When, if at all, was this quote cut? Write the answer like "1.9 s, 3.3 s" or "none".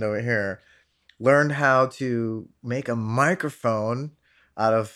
none